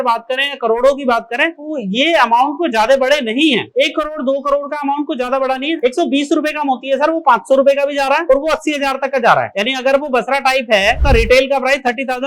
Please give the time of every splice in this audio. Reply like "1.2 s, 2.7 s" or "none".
5.8 s, 11.0 s